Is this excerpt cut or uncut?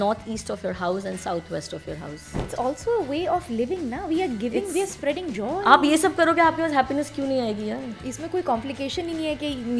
cut